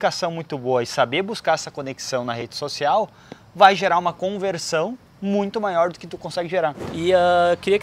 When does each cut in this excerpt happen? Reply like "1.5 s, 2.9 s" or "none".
6.9 s